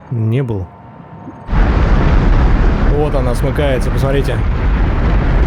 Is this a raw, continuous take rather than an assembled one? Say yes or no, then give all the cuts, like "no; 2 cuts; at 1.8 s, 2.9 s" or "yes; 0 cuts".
no; 1 cut; at 1.6 s